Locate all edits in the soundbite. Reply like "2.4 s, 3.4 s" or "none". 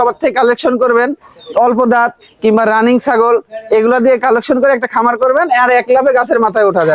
none